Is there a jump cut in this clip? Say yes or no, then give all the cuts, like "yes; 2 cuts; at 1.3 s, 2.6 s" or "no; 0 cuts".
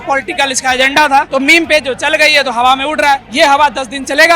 yes; 2 cuts; at 1.3 s, 3.3 s